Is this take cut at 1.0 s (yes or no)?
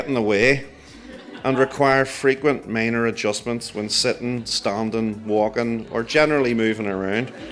no